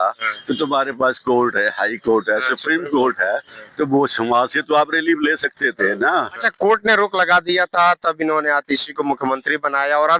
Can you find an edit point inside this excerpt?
yes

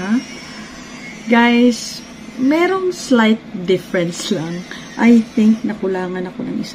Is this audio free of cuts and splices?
yes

